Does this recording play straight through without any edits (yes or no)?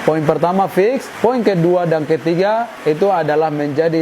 no